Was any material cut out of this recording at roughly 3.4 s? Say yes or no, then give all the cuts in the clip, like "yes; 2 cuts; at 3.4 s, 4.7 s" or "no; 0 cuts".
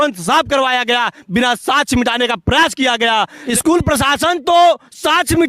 yes; 1 cut; at 3.4 s